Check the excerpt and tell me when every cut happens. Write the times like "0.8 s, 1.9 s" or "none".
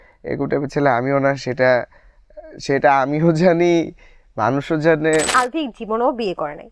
5.3 s